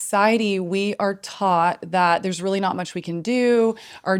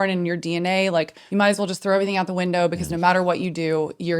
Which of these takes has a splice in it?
second; 1 cut; at 1.2 s

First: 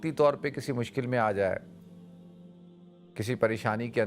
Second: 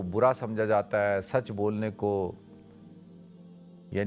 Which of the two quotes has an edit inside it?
first; 2 cuts; at 1.6 s, 3.2 s

